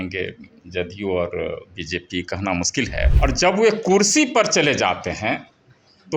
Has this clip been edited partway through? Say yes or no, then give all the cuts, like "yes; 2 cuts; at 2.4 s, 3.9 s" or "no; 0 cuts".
yes; 1 cut; at 3.1 s